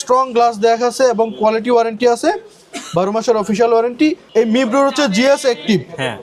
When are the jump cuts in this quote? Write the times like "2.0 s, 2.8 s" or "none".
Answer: 4.3 s